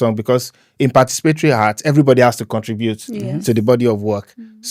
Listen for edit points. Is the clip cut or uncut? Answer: uncut